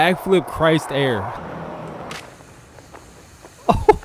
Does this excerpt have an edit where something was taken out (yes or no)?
yes